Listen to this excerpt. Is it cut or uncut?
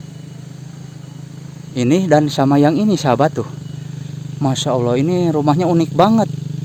uncut